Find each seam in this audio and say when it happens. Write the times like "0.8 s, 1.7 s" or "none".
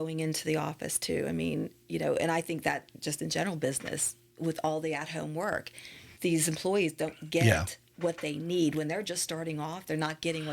none